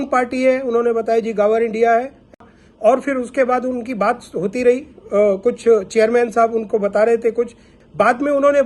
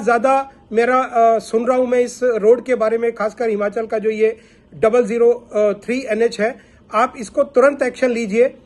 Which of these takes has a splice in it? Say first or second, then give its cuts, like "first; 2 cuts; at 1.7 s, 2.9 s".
first; 1 cut; at 2.4 s